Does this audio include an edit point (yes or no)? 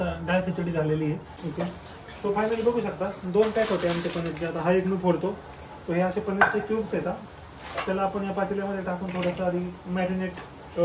yes